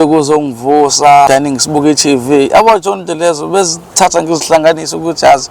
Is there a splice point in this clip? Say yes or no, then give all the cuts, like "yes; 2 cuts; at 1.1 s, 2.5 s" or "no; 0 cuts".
yes; 1 cut; at 1.3 s